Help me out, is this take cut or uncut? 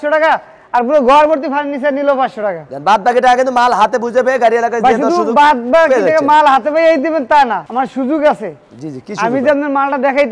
uncut